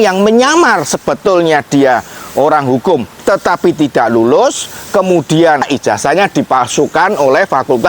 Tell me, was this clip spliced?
yes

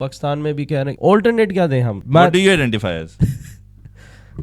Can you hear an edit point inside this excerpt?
yes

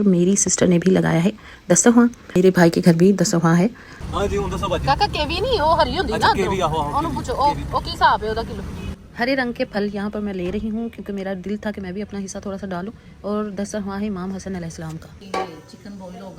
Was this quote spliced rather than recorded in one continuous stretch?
yes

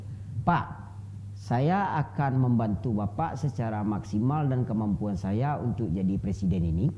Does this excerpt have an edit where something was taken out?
no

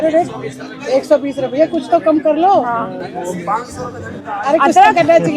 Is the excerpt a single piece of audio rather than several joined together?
yes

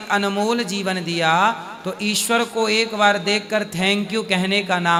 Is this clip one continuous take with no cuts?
yes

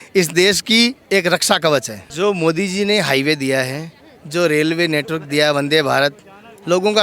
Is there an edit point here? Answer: yes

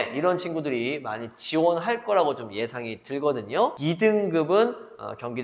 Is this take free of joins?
yes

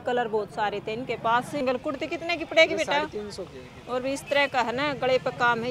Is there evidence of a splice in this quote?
yes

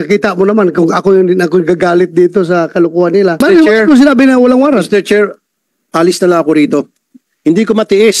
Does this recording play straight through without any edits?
no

